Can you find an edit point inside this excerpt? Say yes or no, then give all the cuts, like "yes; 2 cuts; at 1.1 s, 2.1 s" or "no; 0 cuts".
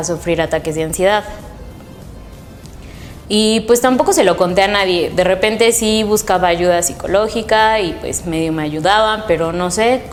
no; 0 cuts